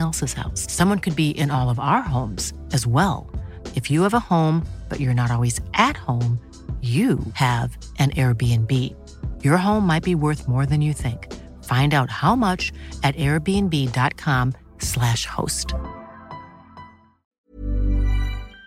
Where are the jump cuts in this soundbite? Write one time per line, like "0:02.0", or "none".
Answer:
0:17.2